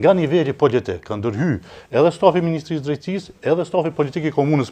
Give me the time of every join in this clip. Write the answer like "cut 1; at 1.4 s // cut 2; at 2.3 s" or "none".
none